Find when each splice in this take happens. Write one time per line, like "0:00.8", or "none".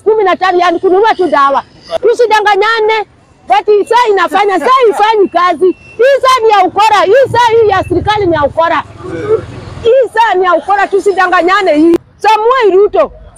0:01.9
0:12.1